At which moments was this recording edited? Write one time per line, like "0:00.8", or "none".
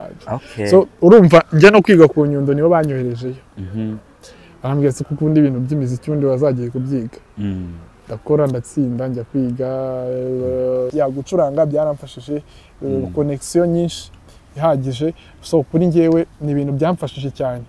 0:10.9